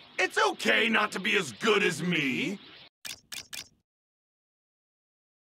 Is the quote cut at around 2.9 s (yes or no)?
no